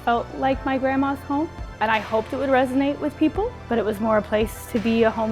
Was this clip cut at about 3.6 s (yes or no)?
yes